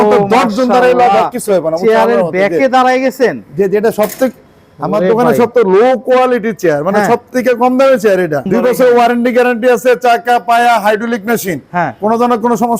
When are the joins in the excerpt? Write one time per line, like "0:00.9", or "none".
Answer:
0:08.5

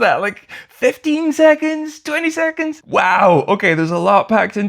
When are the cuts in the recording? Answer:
0:02.8

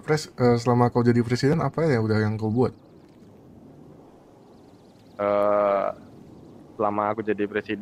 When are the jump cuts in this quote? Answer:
none

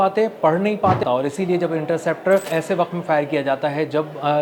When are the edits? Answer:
0:01.0
0:02.5

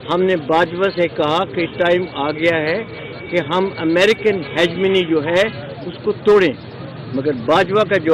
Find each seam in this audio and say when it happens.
none

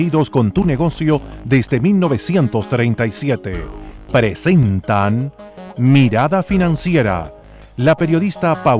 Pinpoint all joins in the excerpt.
none

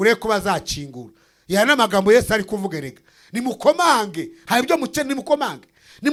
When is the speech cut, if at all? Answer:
none

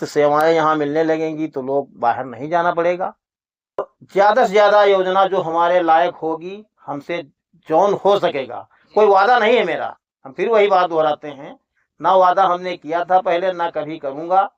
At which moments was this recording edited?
0:04.0

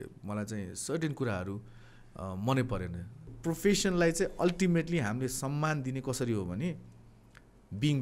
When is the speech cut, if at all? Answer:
0:03.3

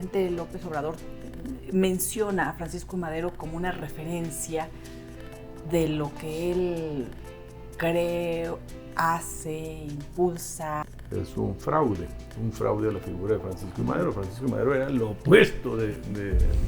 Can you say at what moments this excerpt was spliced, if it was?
0:10.9

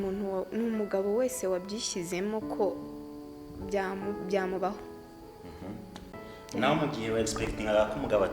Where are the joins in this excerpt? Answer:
0:06.2

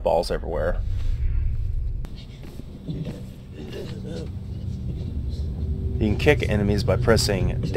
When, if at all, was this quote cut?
0:02.0

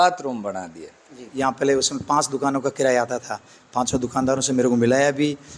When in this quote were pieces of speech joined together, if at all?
0:01.2

